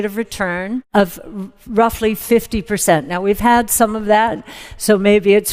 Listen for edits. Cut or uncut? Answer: uncut